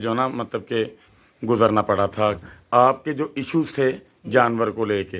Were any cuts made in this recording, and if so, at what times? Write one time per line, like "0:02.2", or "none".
0:02.4